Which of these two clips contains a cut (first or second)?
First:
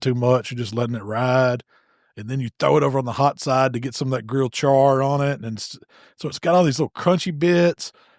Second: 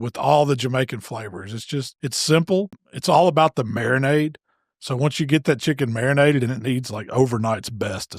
second